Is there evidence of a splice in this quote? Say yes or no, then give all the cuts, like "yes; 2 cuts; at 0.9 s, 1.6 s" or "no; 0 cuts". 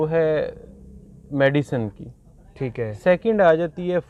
no; 0 cuts